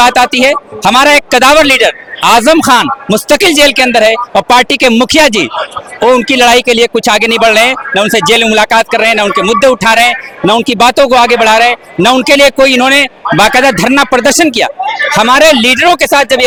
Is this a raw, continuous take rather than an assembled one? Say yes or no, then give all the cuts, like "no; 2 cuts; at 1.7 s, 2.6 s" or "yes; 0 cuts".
yes; 0 cuts